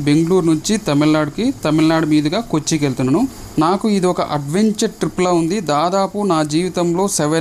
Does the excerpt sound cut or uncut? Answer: cut